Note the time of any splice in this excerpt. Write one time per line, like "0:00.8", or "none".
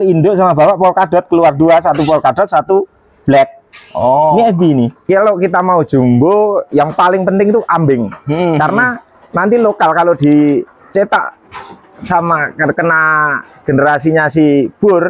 0:05.0
0:06.7